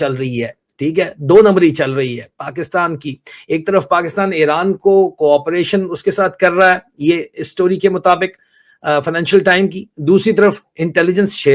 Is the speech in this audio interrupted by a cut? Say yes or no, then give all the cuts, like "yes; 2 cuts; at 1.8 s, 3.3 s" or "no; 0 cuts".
no; 0 cuts